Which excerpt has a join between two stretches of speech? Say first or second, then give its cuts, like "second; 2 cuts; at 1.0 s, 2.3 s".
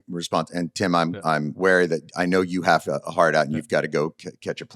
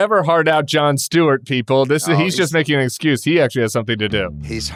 first; 1 cut; at 1.5 s